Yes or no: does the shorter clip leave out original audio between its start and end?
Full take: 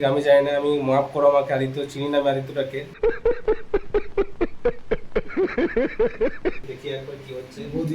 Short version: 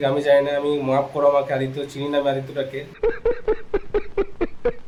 no